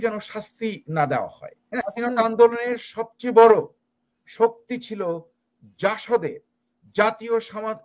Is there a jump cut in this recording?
yes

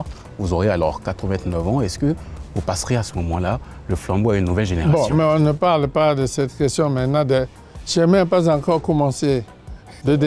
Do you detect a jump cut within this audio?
no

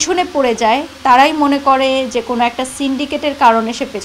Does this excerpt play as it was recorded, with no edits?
yes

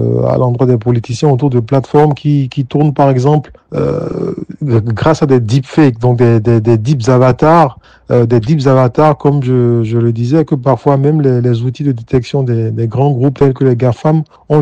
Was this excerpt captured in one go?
yes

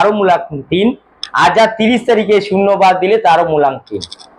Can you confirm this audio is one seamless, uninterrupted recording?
yes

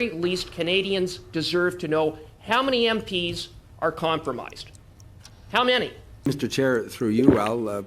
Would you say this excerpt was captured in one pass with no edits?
no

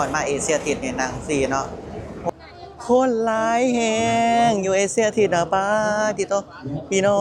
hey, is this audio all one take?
no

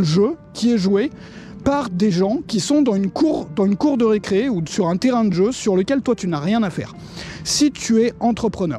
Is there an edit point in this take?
no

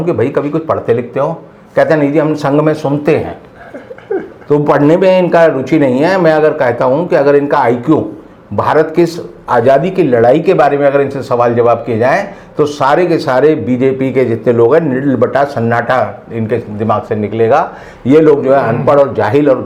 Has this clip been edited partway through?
no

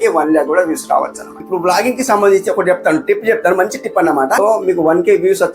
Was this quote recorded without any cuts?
no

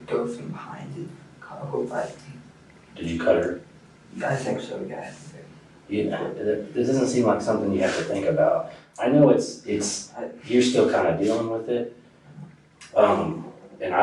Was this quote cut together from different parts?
no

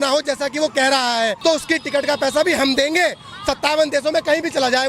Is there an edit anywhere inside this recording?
yes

